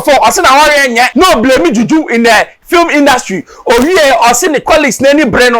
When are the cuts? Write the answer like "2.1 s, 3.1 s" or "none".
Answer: 1.1 s